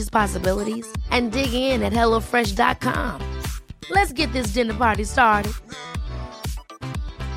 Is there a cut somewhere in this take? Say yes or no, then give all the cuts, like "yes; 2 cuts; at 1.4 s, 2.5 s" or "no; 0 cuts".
no; 0 cuts